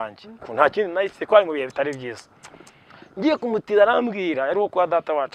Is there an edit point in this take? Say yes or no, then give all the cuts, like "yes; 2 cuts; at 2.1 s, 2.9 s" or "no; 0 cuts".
no; 0 cuts